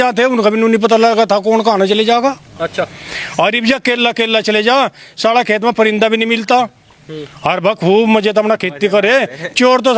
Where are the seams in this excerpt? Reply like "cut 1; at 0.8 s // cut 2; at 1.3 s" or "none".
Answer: none